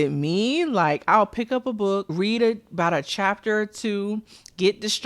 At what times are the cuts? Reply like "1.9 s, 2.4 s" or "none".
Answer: 2.1 s